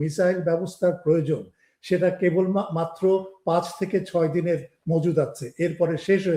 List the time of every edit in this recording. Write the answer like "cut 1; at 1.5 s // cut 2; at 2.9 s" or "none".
none